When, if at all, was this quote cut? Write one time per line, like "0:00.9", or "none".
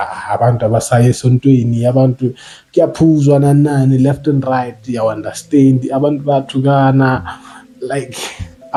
none